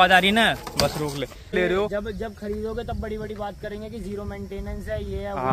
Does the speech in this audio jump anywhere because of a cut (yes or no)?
yes